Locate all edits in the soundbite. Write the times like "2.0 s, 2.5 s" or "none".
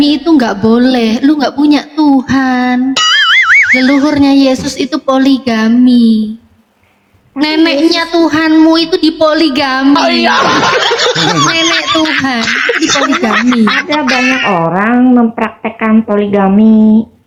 none